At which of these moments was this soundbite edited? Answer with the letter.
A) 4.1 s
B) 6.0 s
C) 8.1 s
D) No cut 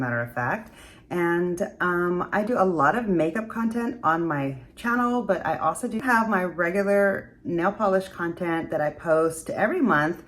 B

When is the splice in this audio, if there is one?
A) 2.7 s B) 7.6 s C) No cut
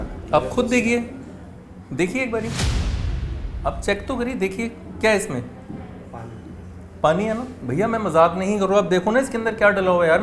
B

